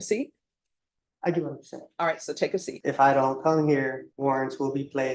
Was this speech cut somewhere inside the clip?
yes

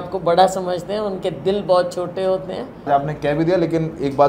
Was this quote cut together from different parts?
yes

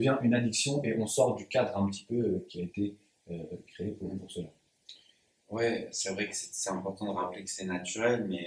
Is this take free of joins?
yes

